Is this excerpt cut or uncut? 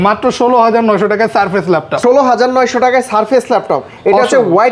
uncut